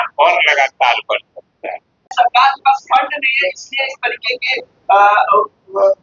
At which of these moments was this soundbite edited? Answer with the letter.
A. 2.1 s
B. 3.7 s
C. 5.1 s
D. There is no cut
A